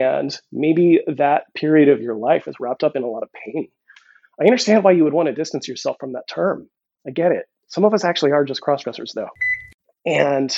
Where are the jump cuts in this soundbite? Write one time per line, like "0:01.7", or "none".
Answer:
0:07.6
0:09.4